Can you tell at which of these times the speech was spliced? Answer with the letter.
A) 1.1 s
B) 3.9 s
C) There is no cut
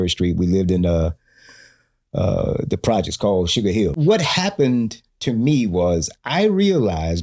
B